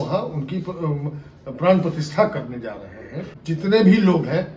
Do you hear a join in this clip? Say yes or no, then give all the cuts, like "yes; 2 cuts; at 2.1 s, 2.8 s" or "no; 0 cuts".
yes; 1 cut; at 3.3 s